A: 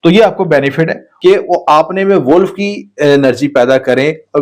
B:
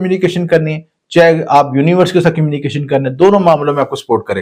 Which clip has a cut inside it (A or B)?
A